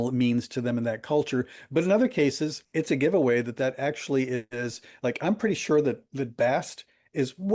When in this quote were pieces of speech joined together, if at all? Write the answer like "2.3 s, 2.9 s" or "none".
2.6 s